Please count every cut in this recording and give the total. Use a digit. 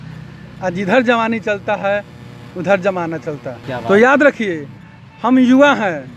0